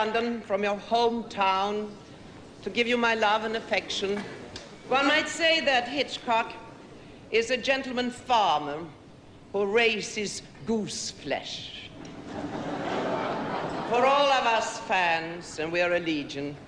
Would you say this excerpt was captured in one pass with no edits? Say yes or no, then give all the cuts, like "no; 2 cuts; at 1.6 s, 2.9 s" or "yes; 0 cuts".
yes; 0 cuts